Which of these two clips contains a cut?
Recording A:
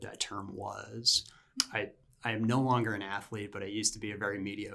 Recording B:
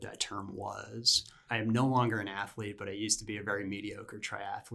B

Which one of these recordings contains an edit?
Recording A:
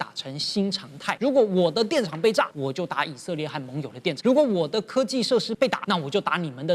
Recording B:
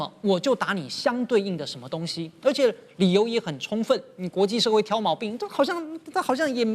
A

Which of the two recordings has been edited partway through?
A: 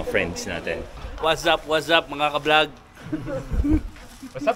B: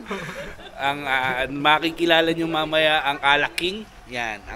A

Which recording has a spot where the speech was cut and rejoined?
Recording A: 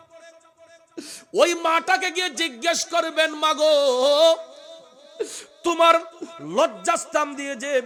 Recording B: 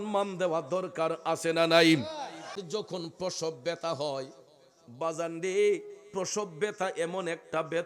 B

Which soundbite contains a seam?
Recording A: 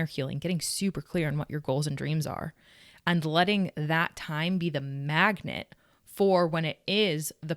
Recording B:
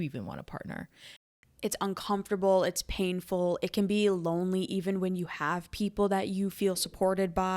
B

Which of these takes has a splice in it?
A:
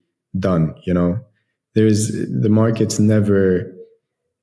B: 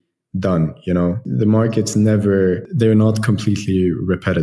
B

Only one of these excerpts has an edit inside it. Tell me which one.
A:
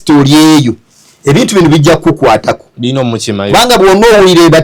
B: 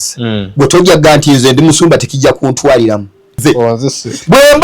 B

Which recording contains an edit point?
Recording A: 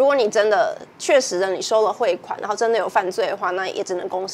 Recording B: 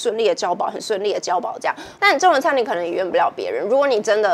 B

